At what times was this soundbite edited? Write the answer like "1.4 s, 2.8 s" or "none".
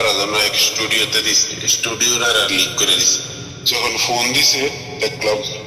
3.6 s